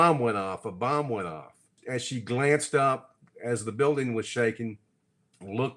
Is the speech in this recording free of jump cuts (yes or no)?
no